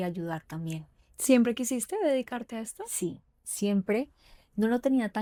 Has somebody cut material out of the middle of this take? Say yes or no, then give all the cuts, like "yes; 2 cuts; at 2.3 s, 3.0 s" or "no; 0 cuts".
no; 0 cuts